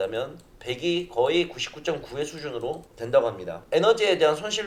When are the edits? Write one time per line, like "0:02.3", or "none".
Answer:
none